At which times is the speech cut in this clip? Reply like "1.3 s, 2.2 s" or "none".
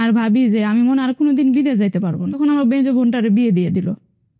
2.3 s